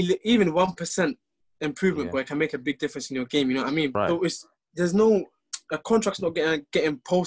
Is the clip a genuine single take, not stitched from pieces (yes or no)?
no